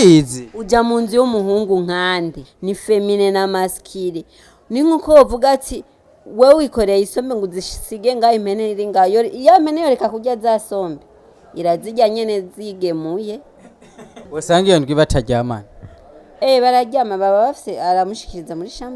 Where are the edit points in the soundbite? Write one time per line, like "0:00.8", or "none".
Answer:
0:02.5
0:14.3